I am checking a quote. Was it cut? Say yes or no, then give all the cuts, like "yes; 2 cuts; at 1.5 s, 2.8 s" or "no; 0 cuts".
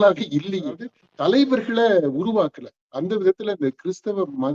yes; 1 cut; at 0.9 s